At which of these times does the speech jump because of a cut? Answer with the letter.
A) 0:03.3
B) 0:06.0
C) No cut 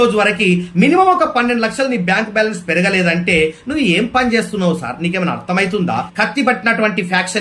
B